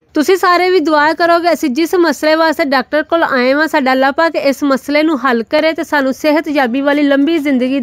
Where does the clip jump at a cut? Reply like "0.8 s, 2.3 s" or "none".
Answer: none